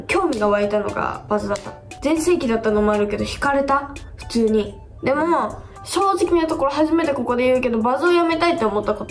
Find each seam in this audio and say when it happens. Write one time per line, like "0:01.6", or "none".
none